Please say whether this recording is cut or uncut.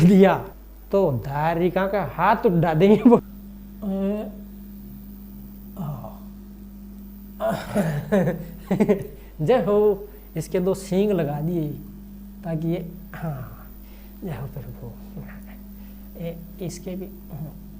cut